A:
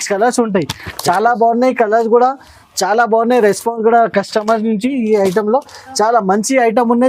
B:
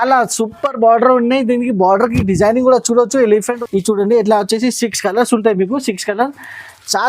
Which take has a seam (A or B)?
B